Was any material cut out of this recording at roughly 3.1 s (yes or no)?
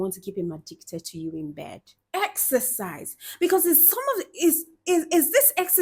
no